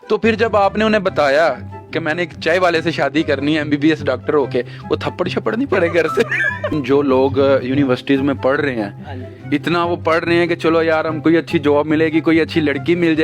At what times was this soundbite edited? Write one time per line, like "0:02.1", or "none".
0:06.8